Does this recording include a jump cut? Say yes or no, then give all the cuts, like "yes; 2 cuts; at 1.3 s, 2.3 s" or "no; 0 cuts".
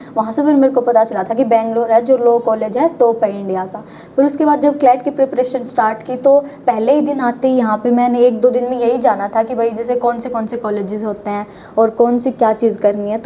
no; 0 cuts